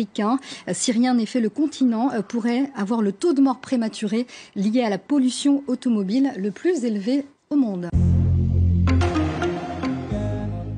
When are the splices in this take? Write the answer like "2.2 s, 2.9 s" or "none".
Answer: 7.9 s